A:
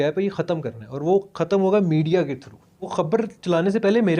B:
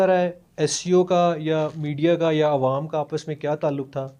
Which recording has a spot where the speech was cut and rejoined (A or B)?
A